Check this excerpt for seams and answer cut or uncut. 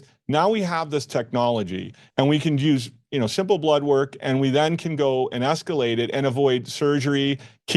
uncut